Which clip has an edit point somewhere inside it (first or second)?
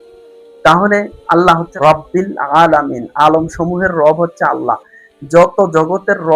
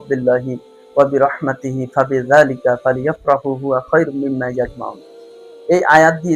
first